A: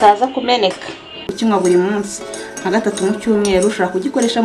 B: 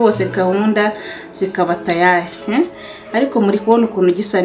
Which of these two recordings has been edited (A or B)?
A